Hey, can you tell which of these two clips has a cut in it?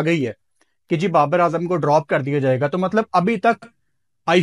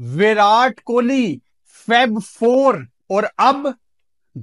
second; 1 cut; at 2.9 s

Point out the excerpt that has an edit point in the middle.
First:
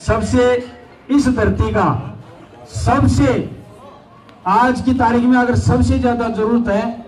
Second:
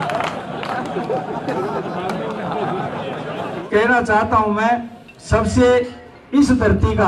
second; 1 cut; at 3.5 s

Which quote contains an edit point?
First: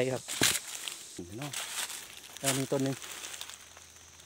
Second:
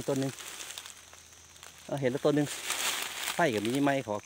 first; 1 cut; at 1.2 s

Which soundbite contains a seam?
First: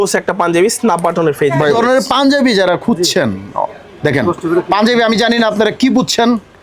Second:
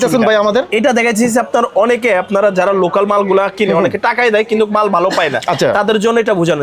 first; 1 cut; at 1.8 s

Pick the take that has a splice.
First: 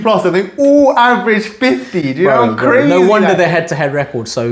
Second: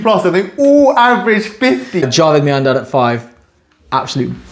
second; 1 cut; at 2.0 s

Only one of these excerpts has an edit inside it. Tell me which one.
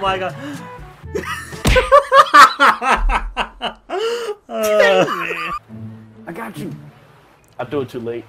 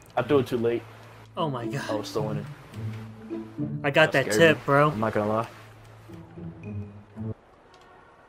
first; 1 cut; at 5.6 s

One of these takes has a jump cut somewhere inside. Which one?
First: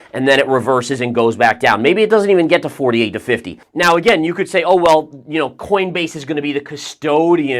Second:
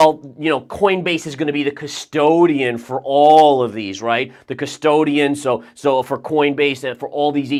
first; 1 cut; at 3.6 s

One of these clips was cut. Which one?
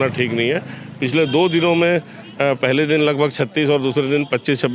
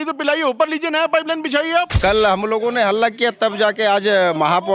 second; 1 cut; at 2.0 s

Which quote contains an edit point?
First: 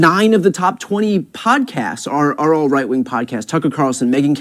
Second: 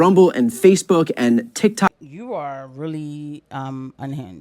second; 1 cut; at 1.9 s

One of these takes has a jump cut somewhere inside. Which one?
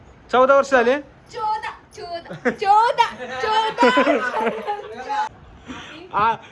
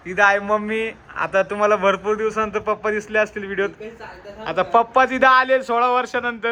first; 1 cut; at 5.3 s

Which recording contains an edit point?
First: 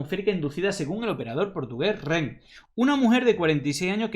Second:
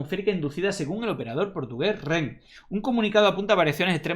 first; 1 cut; at 2.6 s

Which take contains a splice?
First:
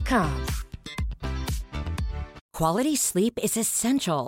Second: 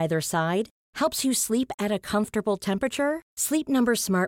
first; 1 cut; at 2.4 s

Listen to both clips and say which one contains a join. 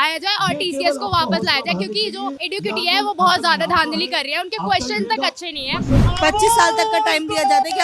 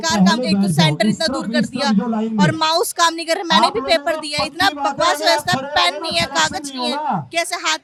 first; 2 cuts; at 2.5 s, 6.1 s

